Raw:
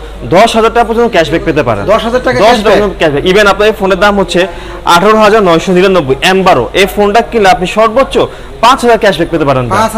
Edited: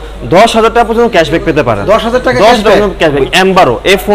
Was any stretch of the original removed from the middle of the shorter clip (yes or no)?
yes